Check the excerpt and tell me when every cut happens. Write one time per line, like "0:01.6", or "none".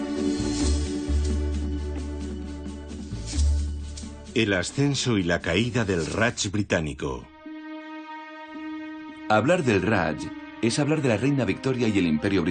none